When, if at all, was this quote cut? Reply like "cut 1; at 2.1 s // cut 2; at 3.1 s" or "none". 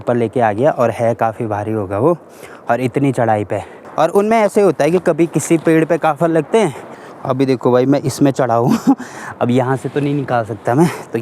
cut 1; at 3.8 s // cut 2; at 6.8 s